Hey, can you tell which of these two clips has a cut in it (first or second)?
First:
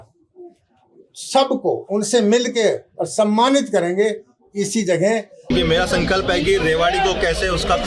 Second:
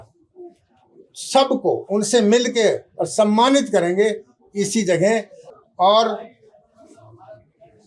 first